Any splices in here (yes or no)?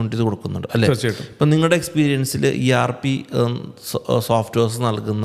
no